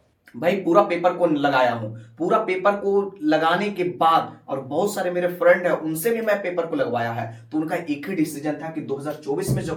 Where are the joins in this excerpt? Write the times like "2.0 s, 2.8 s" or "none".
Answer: none